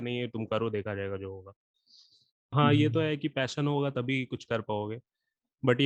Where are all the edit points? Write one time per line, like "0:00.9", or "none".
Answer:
0:02.5